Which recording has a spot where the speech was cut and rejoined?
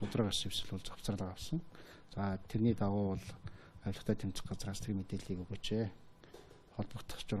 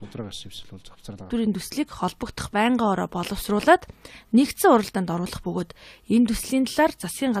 first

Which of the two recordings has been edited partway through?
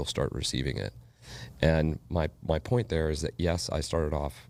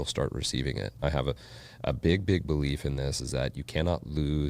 second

